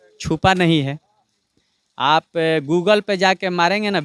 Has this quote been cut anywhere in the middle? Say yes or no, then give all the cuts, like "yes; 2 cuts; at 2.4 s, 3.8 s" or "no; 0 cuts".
no; 0 cuts